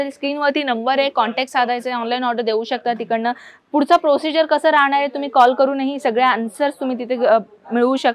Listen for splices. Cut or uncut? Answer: uncut